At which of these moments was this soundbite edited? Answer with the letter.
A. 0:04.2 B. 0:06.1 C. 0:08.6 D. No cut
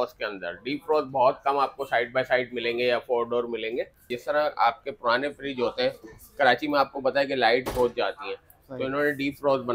A